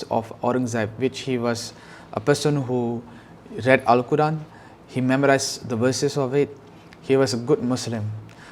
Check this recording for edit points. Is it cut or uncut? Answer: uncut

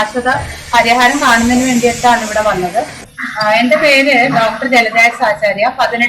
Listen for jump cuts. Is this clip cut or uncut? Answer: cut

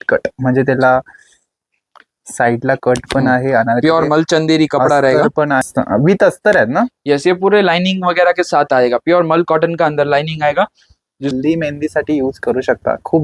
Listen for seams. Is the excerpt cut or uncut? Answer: cut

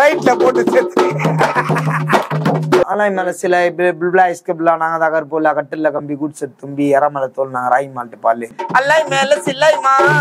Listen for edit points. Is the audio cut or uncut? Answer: cut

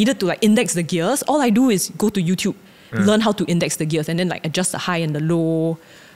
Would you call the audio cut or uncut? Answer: uncut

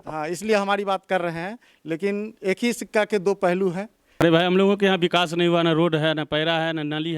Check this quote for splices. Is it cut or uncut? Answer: cut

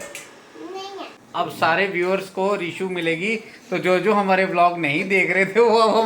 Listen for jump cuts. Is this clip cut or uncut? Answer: cut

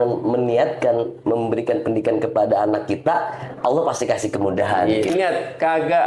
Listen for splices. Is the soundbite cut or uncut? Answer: cut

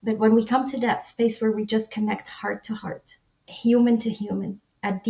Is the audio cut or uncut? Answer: uncut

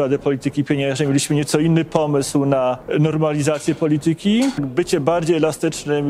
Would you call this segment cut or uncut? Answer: cut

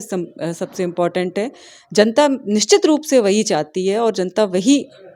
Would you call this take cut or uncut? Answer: uncut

